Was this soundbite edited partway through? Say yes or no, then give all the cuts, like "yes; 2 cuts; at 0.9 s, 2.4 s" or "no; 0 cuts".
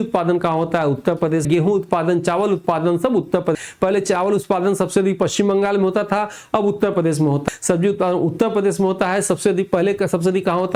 yes; 3 cuts; at 1.4 s, 3.6 s, 7.4 s